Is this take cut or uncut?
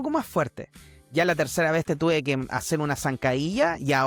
uncut